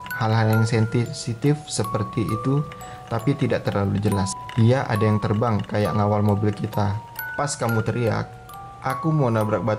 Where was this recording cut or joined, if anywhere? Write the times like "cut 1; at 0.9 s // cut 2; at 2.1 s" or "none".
cut 1; at 4.4 s // cut 2; at 7.0 s